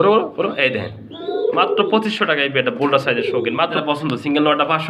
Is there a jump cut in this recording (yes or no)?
yes